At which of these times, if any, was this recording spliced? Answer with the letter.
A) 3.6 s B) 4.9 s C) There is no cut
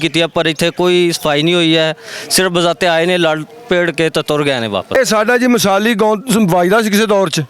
B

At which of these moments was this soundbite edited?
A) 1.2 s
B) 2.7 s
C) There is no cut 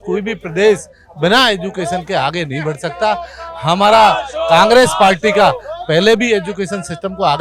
C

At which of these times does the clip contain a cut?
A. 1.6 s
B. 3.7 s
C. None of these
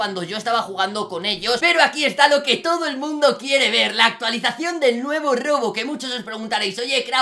A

